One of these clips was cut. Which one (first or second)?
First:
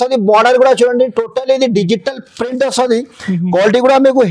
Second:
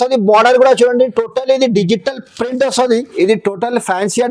second